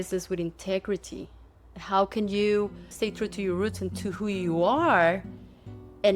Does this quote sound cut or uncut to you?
cut